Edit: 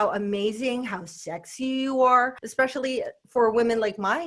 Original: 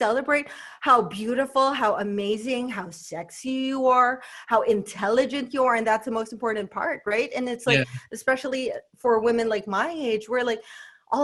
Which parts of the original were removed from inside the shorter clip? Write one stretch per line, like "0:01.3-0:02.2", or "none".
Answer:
0:04.3-0:08.1